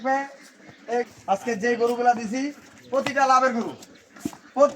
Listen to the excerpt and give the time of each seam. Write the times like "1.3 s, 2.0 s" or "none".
1.1 s